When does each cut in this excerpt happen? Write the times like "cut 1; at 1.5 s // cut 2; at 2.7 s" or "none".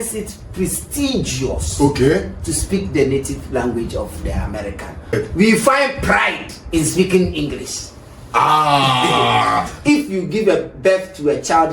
cut 1; at 5.1 s // cut 2; at 9.7 s